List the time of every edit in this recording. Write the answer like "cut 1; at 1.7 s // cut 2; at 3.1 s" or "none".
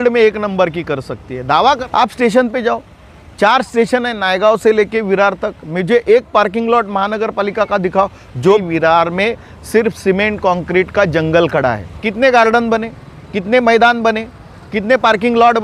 cut 1; at 1.8 s // cut 2; at 8.6 s // cut 3; at 11.9 s

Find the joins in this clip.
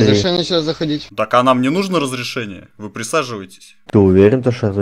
cut 1; at 1.1 s

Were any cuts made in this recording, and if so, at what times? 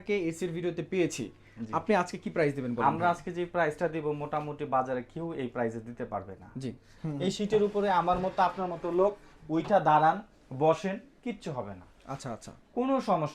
cut 1; at 7.0 s

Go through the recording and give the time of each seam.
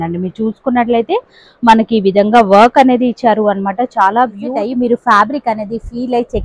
cut 1; at 4.5 s

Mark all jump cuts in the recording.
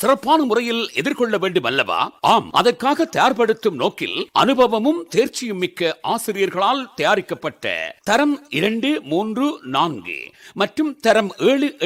none

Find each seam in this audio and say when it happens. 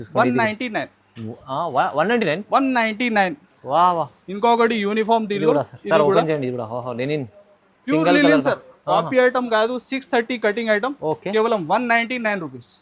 none

